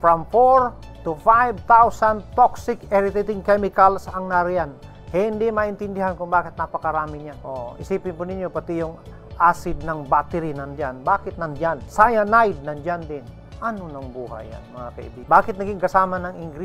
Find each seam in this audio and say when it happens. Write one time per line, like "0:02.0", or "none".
0:07.3
0:11.9
0:15.2